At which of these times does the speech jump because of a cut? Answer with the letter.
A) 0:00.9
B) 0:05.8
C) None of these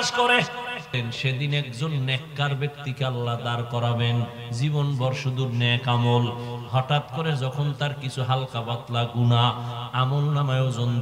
A